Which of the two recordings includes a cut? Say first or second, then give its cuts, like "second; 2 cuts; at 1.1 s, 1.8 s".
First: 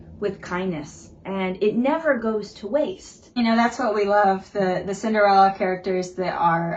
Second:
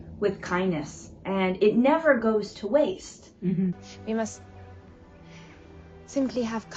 first; 1 cut; at 3.2 s